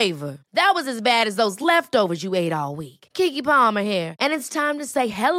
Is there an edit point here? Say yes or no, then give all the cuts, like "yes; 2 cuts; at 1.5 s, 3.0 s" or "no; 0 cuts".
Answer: no; 0 cuts